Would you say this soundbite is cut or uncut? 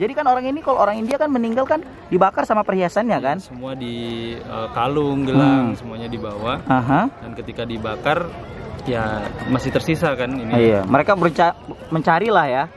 uncut